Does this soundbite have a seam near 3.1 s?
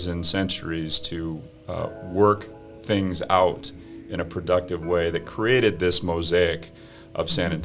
no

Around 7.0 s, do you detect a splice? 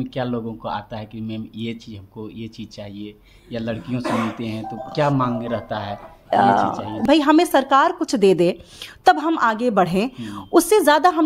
yes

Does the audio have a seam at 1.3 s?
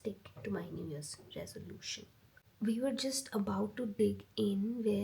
no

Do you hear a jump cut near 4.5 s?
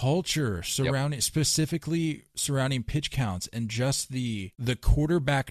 yes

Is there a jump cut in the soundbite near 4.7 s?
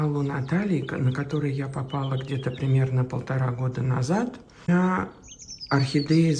yes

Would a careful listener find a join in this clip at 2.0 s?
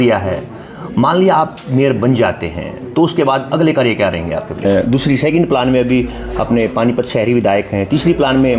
no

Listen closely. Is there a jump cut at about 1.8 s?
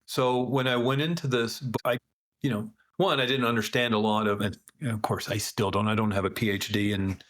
yes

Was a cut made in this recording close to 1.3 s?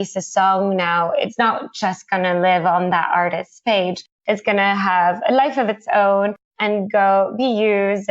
yes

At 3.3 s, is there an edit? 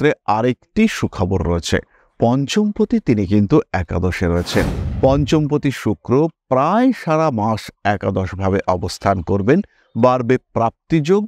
no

